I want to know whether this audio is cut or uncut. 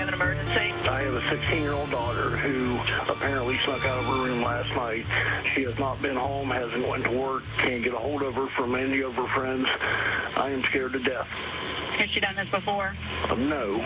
uncut